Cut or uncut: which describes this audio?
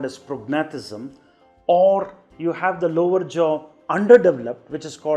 uncut